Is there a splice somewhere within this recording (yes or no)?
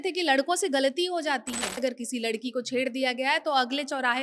yes